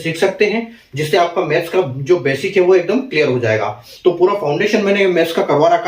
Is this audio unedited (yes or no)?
no